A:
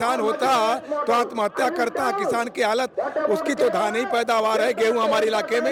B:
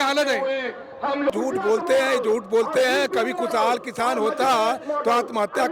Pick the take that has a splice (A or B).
B